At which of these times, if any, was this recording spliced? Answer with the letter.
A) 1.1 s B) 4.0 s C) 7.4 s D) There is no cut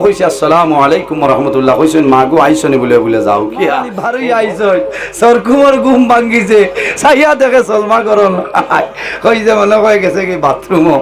B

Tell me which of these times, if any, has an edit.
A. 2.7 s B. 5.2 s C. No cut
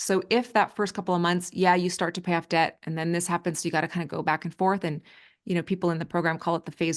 C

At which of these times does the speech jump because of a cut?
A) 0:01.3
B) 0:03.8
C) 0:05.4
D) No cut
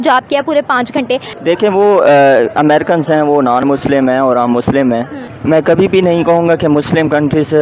A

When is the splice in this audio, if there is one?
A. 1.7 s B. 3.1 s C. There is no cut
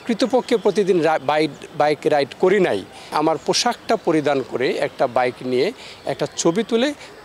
B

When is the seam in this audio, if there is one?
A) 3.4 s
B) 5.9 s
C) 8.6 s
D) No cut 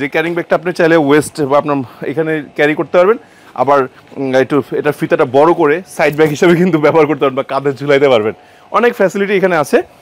D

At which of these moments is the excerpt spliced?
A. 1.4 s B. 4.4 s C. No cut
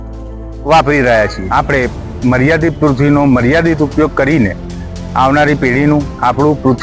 A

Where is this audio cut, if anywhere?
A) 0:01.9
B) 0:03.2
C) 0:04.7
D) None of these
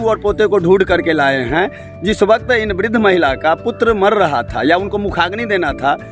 D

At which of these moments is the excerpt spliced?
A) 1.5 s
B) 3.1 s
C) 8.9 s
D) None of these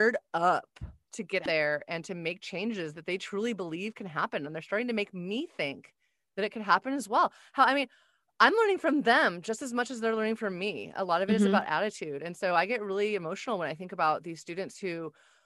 A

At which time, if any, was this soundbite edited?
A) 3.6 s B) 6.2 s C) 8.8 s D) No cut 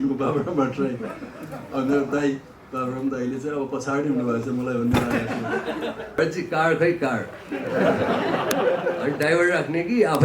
B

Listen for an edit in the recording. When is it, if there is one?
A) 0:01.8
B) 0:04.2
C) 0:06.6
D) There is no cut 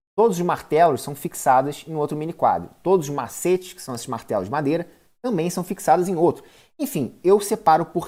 D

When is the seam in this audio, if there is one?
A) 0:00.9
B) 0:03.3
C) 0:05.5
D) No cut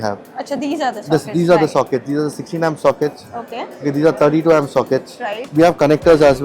C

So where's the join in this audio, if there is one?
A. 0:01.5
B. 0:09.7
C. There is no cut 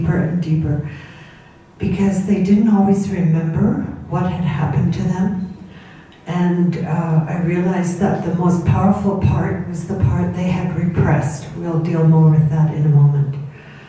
B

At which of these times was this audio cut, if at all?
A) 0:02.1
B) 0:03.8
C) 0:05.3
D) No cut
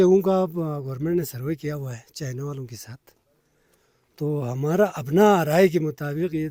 D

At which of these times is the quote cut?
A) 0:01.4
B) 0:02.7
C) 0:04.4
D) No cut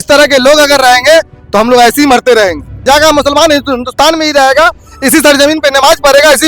B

